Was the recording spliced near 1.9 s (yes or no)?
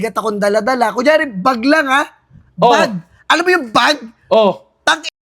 no